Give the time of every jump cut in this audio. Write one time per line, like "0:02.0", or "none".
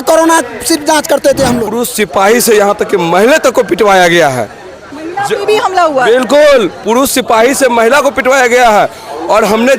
0:01.7